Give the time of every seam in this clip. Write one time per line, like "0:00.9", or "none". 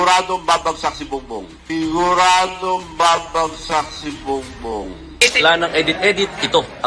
0:05.4